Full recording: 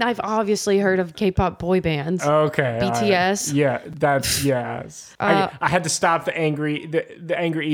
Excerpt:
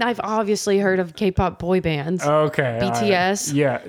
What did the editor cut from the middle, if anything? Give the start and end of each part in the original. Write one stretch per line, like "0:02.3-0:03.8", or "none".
none